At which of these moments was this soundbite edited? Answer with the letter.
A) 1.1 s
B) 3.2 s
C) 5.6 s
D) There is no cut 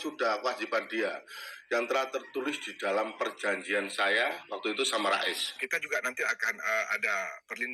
C